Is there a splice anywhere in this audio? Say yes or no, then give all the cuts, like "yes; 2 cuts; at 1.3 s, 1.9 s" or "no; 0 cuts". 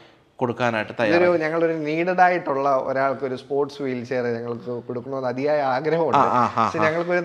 no; 0 cuts